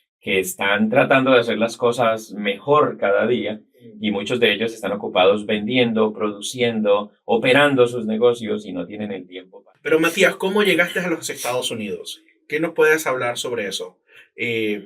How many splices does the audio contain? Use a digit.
1